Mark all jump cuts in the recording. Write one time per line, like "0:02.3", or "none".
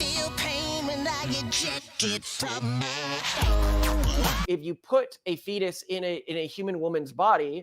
0:04.4